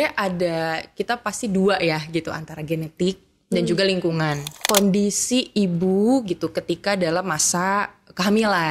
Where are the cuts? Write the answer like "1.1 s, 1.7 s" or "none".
4.5 s

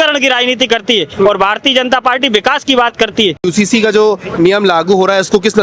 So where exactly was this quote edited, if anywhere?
3.4 s

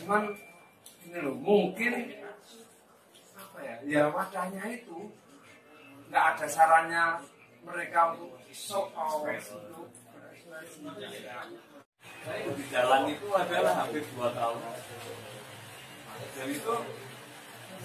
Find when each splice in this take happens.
11.8 s

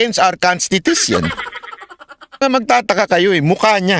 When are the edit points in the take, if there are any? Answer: 2.4 s

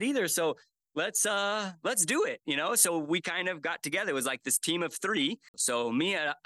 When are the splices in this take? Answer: 5.5 s

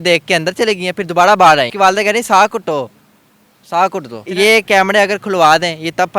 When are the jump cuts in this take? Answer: 1.7 s, 4.2 s

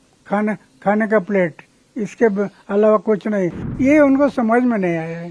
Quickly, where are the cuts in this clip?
3.6 s

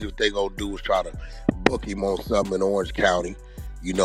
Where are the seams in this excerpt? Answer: none

